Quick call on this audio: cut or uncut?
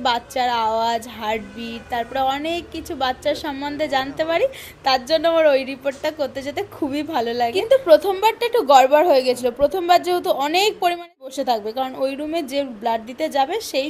cut